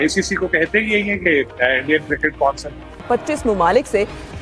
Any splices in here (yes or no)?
yes